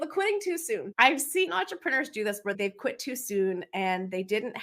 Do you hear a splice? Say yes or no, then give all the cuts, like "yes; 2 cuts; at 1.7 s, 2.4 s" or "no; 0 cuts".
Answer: yes; 2 cuts; at 0.9 s, 2.6 s